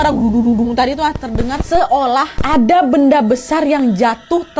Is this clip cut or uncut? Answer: cut